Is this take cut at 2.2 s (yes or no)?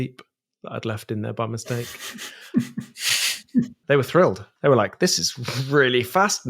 no